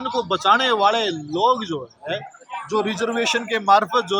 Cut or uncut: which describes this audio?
uncut